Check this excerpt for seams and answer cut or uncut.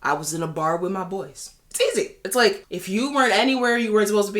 cut